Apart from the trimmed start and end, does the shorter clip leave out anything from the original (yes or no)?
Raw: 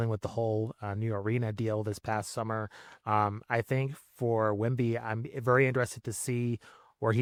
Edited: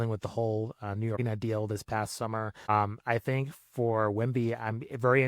yes